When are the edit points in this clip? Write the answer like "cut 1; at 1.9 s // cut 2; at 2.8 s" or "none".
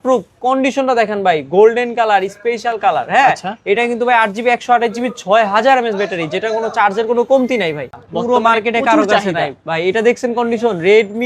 cut 1; at 7.9 s